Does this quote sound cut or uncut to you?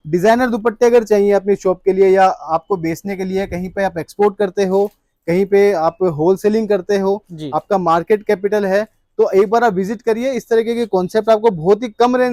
uncut